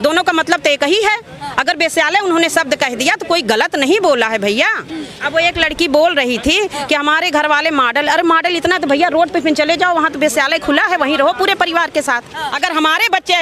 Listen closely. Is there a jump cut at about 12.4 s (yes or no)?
yes